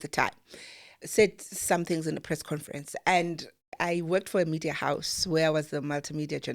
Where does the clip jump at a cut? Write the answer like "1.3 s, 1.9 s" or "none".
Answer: 1.0 s, 2.2 s, 3.7 s